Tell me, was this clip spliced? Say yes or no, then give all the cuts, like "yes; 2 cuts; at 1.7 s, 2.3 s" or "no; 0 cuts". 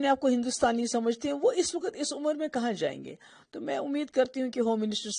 no; 0 cuts